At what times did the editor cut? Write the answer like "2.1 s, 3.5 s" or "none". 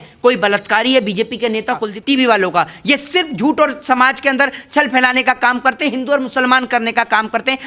1.9 s